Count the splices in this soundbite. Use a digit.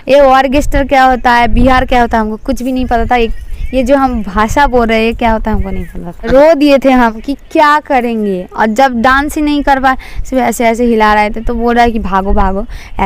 0